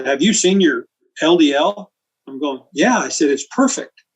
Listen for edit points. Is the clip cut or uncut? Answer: cut